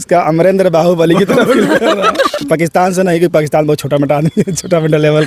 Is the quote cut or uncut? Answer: cut